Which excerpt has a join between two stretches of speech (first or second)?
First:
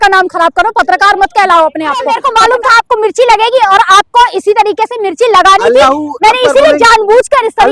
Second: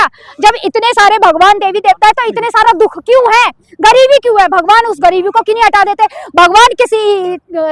first